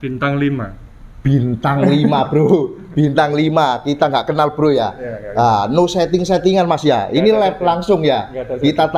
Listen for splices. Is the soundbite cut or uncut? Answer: uncut